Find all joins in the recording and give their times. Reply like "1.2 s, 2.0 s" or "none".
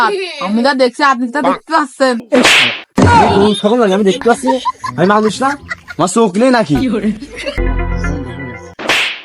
2.2 s, 7.7 s